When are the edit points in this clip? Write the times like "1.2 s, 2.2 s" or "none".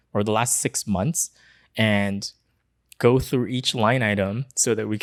none